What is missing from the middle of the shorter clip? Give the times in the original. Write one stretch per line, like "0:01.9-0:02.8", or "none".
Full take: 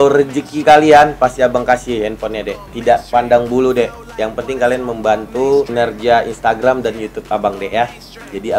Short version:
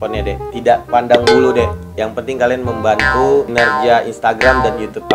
none